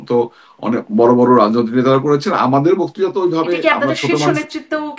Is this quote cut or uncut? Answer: uncut